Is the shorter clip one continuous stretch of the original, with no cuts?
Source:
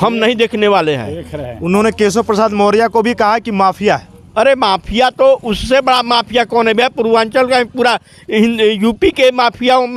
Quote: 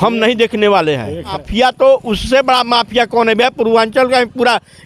no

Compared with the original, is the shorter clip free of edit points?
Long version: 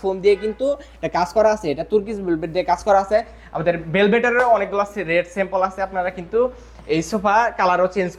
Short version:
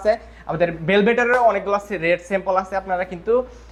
yes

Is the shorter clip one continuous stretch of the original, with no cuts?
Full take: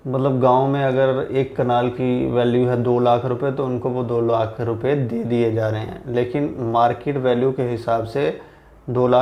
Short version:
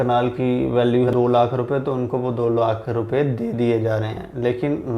no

